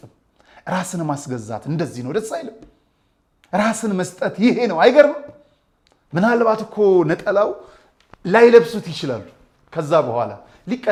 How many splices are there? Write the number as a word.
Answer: zero